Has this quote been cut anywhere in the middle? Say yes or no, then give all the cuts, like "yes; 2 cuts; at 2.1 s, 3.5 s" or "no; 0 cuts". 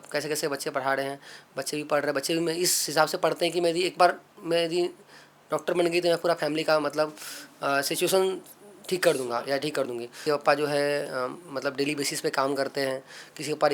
yes; 1 cut; at 10.1 s